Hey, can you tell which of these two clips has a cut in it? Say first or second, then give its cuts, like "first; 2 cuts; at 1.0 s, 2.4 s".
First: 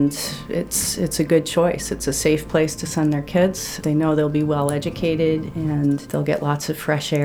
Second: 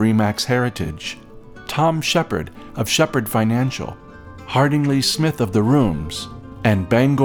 first; 2 cuts; at 3.8 s, 6.1 s